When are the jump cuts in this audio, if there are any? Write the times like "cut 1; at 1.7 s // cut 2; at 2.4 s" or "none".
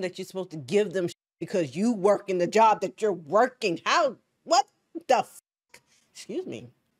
none